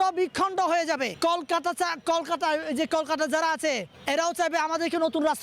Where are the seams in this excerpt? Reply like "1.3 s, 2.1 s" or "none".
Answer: 1.1 s, 3.9 s